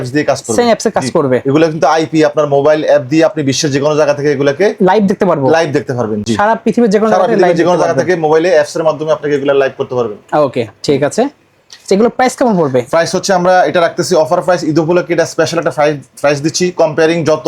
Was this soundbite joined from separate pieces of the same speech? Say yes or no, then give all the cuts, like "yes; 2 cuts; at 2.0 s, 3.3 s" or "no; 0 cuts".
no; 0 cuts